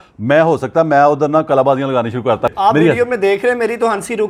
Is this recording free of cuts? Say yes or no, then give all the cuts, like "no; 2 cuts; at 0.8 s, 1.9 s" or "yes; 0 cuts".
yes; 0 cuts